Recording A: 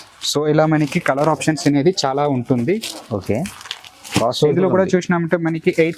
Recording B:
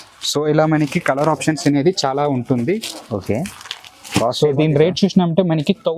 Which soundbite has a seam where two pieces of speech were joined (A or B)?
A